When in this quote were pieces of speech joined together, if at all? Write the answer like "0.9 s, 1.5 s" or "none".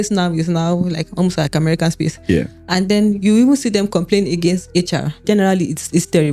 5.2 s

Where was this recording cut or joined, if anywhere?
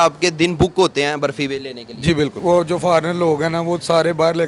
2.4 s

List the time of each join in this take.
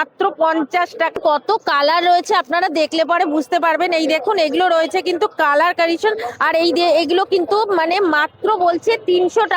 1.2 s

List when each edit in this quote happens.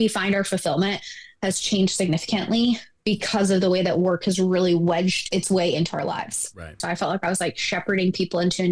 5.3 s, 6.8 s

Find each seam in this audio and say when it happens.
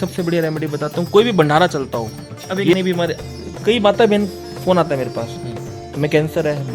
2.8 s

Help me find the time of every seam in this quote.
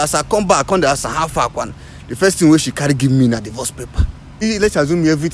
4.4 s

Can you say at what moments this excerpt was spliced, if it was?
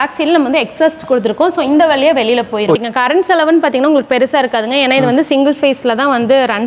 2.8 s

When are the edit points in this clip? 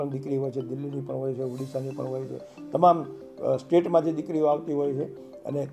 none

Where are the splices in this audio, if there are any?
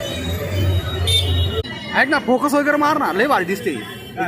1.7 s

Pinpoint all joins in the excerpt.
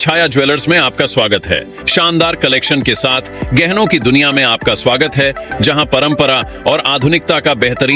1.8 s

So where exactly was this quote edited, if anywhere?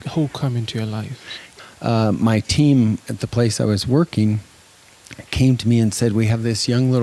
1.5 s

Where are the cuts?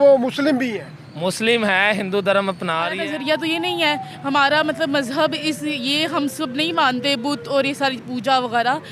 3.0 s

